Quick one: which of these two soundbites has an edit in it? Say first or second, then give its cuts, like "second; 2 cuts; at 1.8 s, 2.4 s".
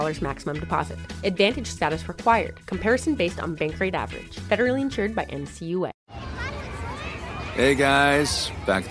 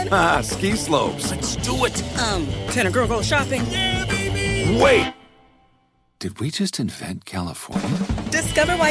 first; 1 cut; at 6.0 s